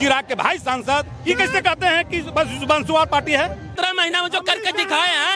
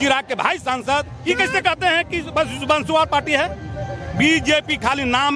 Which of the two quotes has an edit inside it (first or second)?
first